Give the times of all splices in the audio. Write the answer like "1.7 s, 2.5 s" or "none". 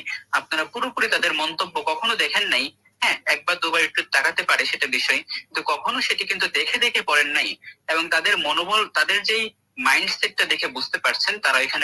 none

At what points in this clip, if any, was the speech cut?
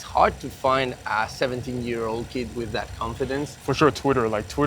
3.6 s

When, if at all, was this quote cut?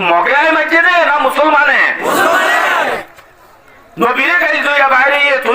3.1 s

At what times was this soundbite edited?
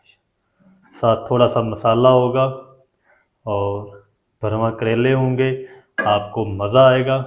none

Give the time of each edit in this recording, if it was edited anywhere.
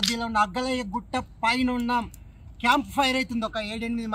none

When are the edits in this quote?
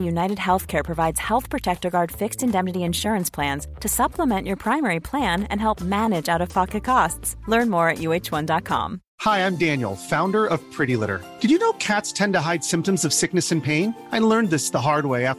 9.0 s

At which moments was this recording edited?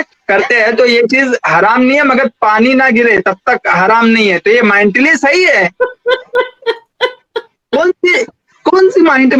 none

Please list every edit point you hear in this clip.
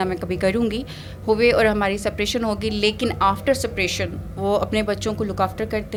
none

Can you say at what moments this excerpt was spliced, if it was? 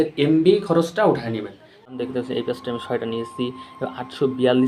1.9 s

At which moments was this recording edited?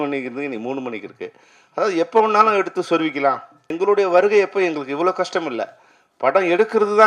3.7 s

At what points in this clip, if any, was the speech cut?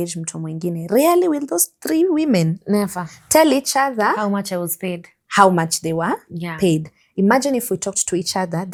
none

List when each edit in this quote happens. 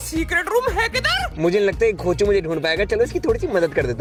none

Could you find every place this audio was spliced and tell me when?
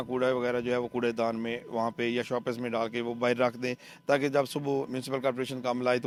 none

